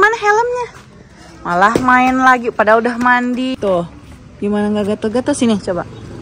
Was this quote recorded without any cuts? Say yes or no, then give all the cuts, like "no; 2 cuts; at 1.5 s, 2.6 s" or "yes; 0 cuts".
no; 1 cut; at 3.5 s